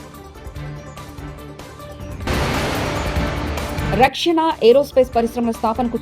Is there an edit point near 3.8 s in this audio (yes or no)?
yes